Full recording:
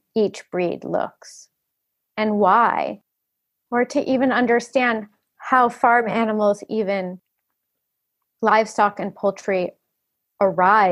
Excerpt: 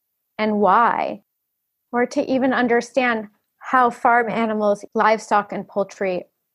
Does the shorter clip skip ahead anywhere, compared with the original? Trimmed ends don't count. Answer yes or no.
yes